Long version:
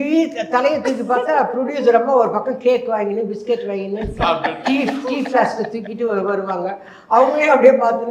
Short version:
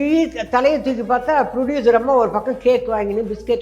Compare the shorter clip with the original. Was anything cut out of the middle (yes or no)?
no